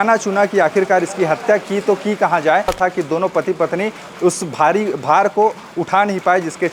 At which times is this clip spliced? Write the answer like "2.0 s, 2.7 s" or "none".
2.7 s